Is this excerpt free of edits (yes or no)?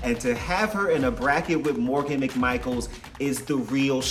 yes